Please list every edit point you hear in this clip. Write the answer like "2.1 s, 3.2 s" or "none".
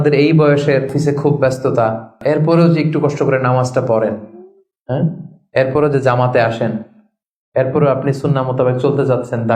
0.9 s, 2.2 s